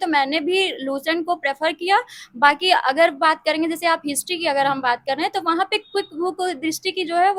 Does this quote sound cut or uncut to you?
uncut